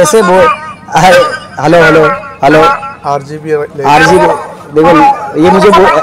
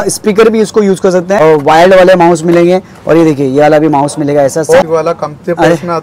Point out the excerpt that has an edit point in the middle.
second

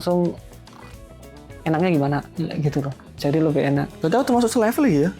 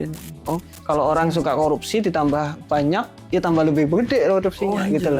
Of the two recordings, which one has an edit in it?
first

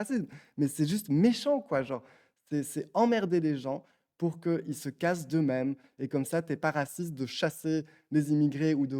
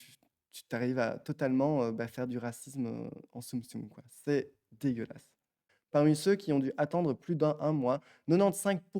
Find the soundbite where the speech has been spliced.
second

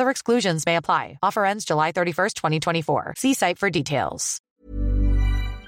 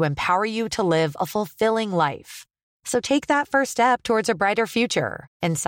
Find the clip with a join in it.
first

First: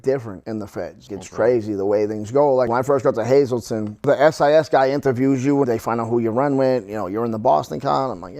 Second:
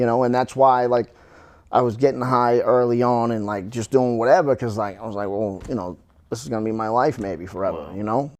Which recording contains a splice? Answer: first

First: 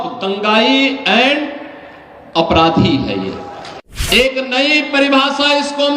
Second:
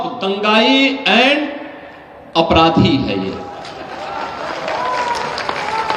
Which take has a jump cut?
first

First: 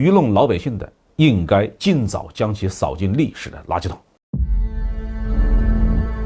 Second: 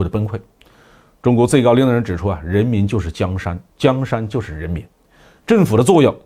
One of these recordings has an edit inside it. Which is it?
first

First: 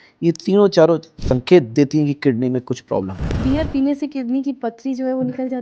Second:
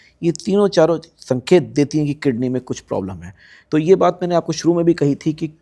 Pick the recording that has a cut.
first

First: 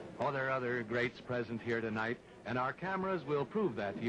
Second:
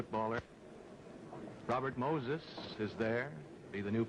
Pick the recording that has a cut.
second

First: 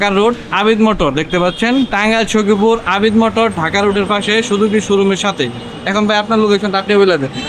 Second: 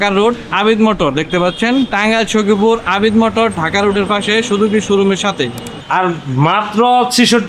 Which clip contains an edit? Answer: second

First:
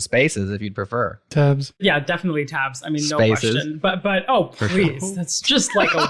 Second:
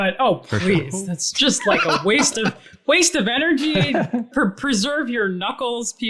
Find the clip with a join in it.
first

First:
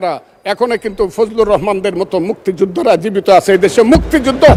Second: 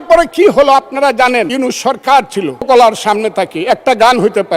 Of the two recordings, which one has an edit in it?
second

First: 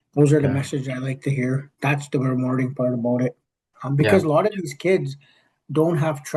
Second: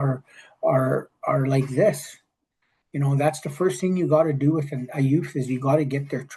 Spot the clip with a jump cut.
first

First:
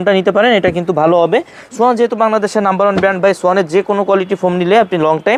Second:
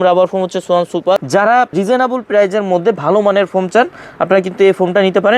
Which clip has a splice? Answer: second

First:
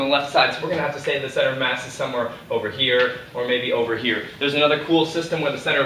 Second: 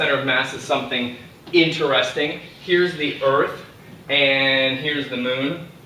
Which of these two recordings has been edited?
first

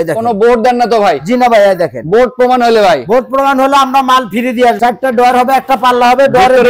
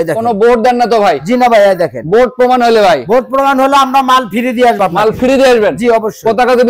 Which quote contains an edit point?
first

